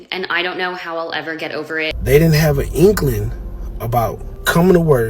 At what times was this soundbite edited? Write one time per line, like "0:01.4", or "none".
0:02.0